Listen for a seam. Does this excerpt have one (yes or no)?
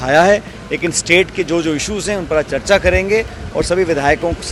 no